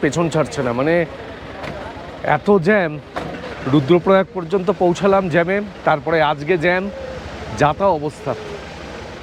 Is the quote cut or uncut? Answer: uncut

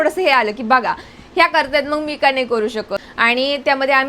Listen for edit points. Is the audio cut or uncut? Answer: cut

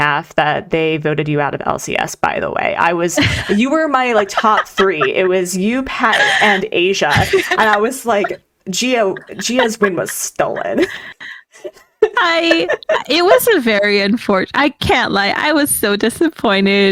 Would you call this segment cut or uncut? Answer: uncut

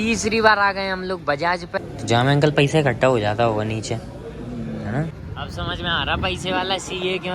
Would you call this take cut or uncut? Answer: cut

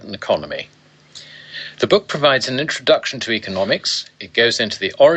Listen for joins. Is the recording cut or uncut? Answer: uncut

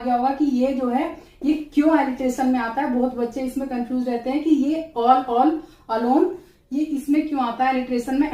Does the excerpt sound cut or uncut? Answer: uncut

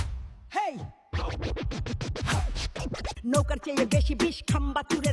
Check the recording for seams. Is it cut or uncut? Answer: cut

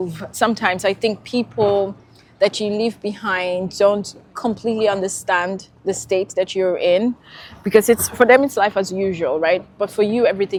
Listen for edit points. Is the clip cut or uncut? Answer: uncut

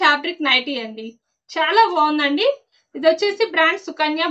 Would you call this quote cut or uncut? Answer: uncut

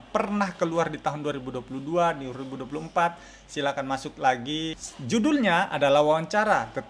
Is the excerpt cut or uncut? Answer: cut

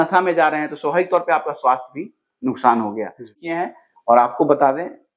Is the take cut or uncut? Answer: cut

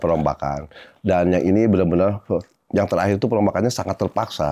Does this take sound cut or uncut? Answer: uncut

